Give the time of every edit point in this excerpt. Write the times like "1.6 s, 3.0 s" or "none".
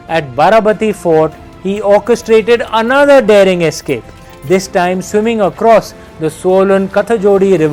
none